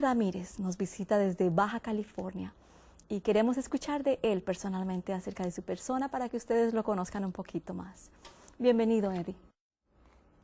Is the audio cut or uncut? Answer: uncut